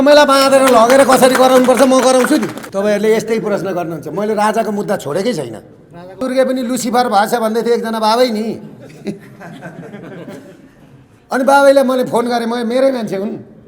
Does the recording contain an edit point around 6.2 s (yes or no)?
yes